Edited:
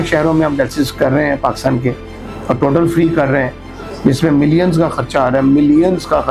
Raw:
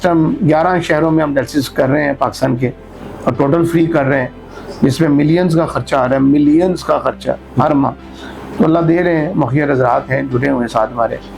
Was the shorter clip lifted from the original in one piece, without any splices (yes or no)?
yes